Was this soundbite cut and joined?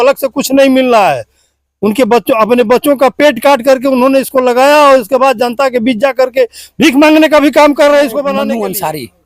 yes; 1 cut; at 8.3 s

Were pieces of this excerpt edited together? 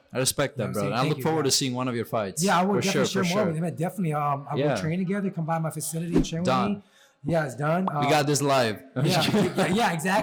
no; 0 cuts

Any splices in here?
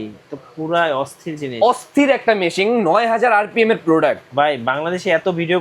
no; 0 cuts

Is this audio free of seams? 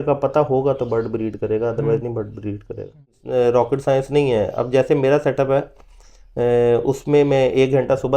no; 1 cut; at 3.2 s

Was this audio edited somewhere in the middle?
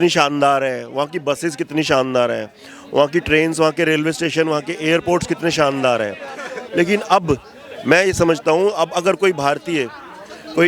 no; 0 cuts

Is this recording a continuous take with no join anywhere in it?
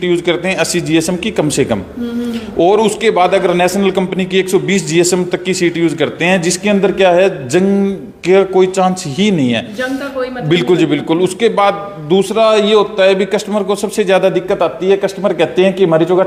yes; 0 cuts

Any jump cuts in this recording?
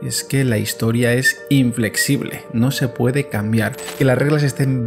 yes; 1 cut; at 3.8 s

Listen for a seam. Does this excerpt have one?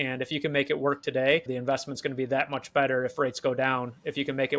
yes; 1 cut; at 1.5 s

